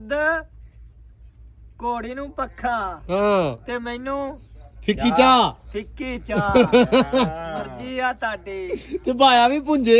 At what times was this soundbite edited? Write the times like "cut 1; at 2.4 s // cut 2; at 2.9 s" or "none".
none